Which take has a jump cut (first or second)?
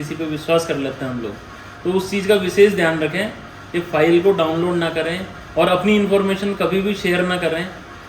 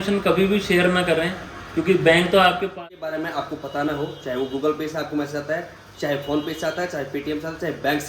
second